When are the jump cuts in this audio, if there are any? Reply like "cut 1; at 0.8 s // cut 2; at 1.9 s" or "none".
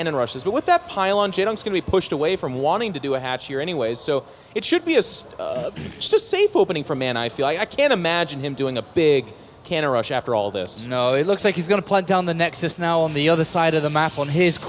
cut 1; at 2.1 s